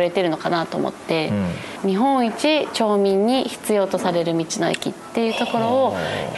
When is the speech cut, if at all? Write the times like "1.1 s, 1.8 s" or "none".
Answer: 1.8 s